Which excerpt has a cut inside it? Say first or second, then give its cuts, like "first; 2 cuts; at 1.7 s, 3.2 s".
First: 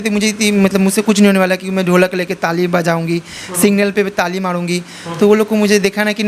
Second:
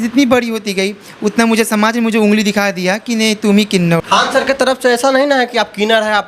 second; 1 cut; at 4.0 s